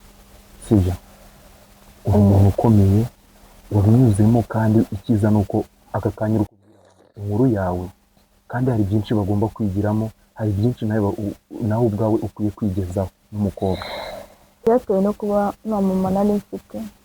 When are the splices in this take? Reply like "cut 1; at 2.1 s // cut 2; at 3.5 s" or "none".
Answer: cut 1; at 14.7 s